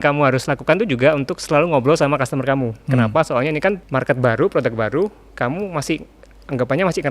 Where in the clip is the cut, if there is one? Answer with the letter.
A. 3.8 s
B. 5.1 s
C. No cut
A